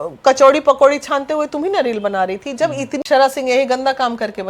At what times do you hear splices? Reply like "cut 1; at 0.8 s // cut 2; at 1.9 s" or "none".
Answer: cut 1; at 3.0 s